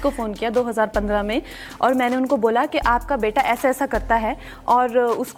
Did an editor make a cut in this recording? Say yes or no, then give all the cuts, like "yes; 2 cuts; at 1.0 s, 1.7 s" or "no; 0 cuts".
no; 0 cuts